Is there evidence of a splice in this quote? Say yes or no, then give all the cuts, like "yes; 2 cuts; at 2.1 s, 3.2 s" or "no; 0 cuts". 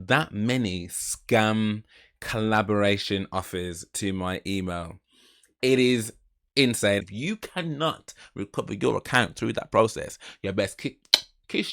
yes; 1 cut; at 7.0 s